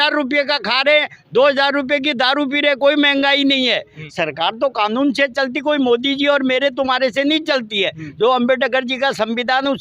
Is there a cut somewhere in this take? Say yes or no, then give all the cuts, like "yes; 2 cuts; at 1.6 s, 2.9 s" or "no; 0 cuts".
yes; 1 cut; at 4.0 s